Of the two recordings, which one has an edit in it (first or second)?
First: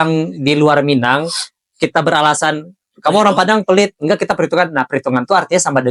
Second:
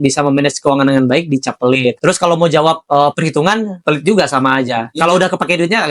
second